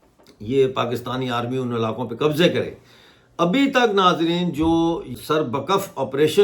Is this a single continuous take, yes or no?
no